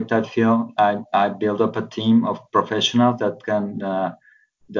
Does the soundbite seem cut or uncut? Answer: uncut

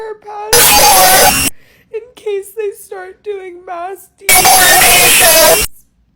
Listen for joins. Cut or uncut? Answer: uncut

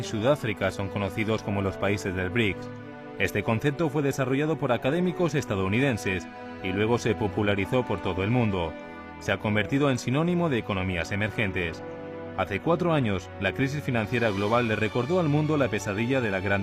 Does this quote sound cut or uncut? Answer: uncut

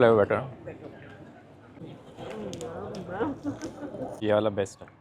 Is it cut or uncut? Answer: cut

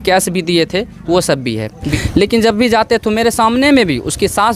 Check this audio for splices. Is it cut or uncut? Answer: cut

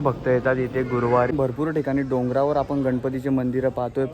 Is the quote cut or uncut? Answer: cut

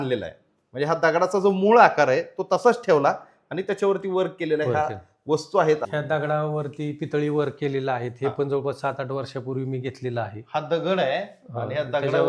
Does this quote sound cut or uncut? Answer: cut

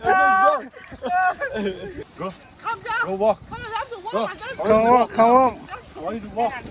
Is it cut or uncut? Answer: cut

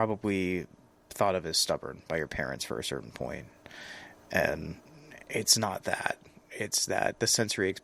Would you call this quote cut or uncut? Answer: uncut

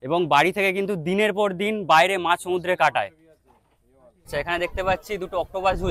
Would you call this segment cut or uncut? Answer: cut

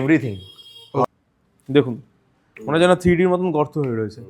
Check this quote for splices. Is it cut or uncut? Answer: cut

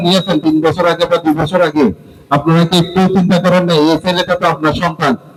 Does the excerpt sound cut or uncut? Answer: uncut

